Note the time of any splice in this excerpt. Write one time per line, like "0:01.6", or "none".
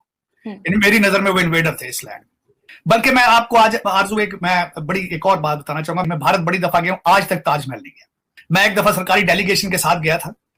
none